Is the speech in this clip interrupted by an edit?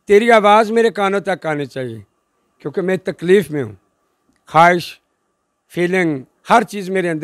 no; 0 cuts

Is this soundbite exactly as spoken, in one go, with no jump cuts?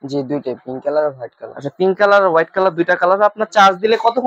yes; 0 cuts

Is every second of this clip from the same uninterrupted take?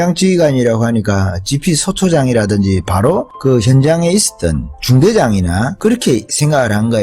no; 2 cuts; at 4.8 s, 6.0 s

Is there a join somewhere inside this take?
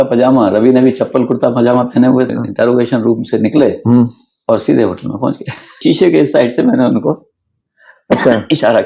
yes; 2 cuts; at 2.3 s, 5.8 s

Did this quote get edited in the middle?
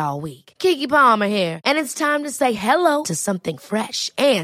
no; 0 cuts

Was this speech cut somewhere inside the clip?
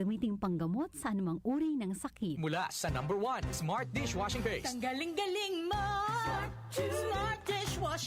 yes; 1 cut; at 2.4 s

